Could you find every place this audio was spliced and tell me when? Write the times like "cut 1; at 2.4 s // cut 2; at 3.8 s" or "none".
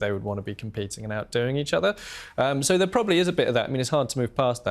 none